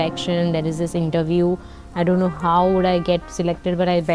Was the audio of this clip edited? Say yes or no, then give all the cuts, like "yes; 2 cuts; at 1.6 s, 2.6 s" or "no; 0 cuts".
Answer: no; 0 cuts